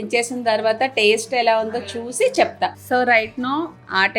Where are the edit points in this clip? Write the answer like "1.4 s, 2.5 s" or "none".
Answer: 2.8 s